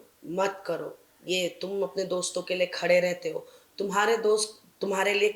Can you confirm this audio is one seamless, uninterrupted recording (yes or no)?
yes